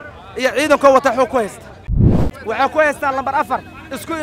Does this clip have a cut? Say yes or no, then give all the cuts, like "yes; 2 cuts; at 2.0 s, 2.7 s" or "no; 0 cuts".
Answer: yes; 1 cut; at 2.0 s